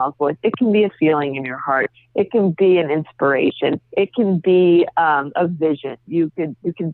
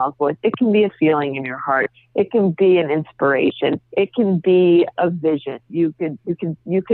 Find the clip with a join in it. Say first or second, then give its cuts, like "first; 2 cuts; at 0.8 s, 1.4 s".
second; 1 cut; at 4.9 s